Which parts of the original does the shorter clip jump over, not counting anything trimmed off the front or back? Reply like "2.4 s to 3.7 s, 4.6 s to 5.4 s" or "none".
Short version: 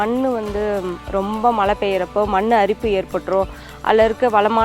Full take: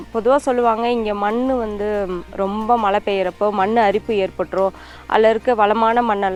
none

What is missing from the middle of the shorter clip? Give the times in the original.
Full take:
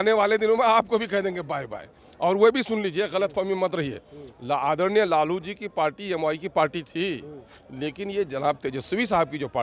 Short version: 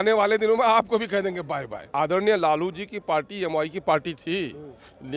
1.9 s to 4.6 s

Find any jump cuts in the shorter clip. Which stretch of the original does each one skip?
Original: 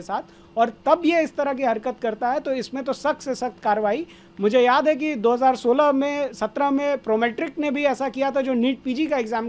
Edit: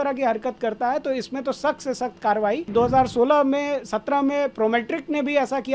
4.1 s to 5.2 s

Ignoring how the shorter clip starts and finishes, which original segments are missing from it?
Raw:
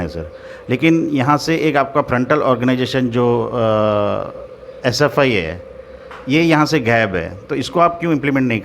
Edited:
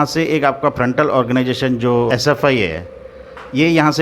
3.4 s to 4.8 s

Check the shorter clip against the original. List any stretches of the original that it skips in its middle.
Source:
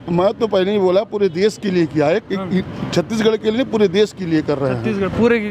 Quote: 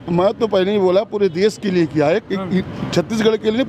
none

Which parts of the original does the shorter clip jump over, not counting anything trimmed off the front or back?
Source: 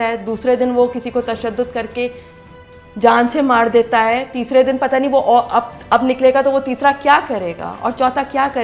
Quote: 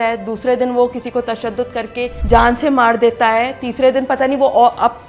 2.2 s to 2.9 s

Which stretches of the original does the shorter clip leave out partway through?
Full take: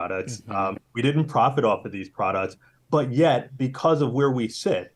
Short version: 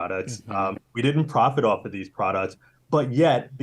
none

